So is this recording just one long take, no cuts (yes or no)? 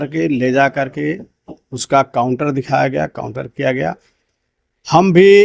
yes